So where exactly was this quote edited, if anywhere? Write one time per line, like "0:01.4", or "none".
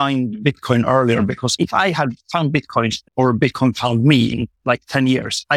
0:01.5
0:03.0

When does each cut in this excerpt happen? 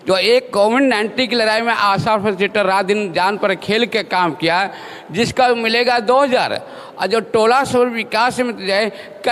none

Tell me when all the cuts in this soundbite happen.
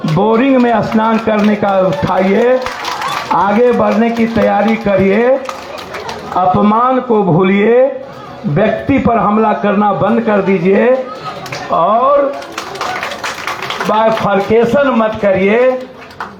none

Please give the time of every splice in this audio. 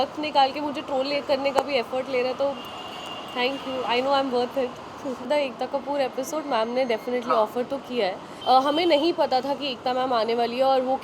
0:05.3
0:08.3

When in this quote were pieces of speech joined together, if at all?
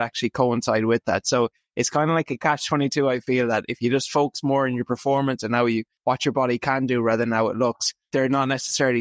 0:05.9
0:07.9

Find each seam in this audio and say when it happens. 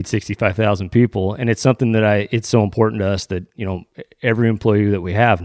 none

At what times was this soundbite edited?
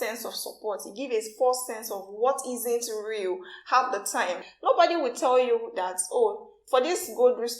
0:04.5
0:06.5

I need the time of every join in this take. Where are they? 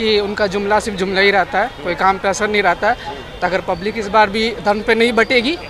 none

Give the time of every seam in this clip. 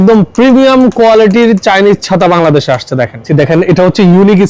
0:03.2

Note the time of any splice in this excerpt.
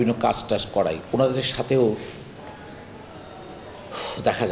none

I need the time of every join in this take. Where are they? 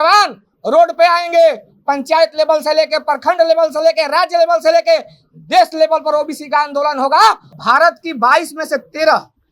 0:07.5

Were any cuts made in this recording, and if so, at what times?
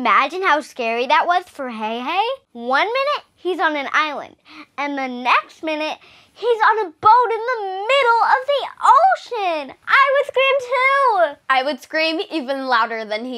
0:02.5

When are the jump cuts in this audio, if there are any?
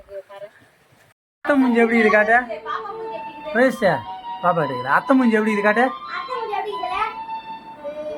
0:01.3

